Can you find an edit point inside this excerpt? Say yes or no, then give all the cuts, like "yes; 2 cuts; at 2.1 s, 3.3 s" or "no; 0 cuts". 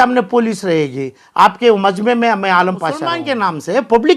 yes; 1 cut; at 3.1 s